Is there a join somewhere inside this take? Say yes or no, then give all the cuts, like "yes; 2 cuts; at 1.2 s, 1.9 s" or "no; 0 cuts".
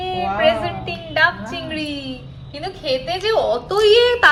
no; 0 cuts